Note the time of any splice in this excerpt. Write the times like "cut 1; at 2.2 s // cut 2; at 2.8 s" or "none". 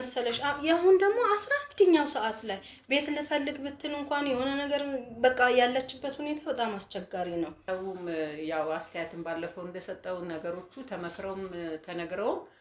cut 1; at 7.6 s

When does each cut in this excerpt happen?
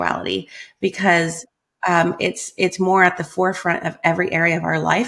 none

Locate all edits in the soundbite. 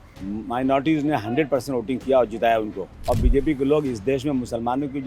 cut 1; at 2.9 s

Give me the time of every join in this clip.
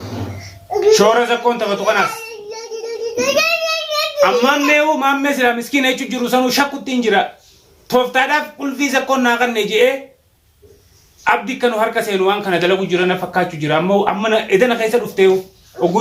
none

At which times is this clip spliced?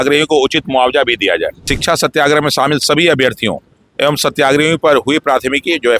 cut 1; at 1.7 s

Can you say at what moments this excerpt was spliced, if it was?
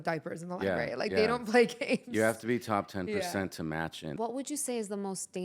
cut 1; at 4.1 s

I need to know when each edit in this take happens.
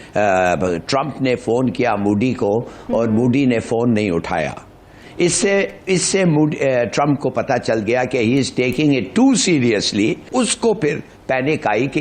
cut 1; at 10.2 s

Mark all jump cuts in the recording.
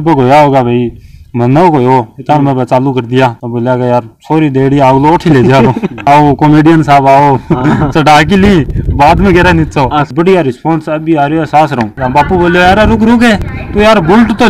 cut 1; at 6.1 s // cut 2; at 10.1 s // cut 3; at 11.9 s

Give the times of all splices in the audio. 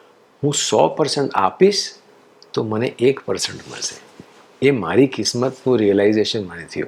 none

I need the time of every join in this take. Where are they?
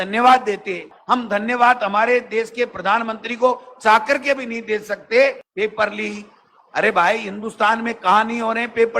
cut 1; at 0.9 s // cut 2; at 5.4 s

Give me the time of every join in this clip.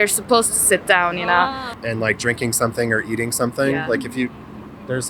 cut 1; at 1.7 s

